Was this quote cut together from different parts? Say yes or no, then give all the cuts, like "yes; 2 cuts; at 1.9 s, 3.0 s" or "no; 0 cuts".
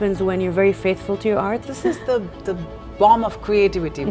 yes; 1 cut; at 1.7 s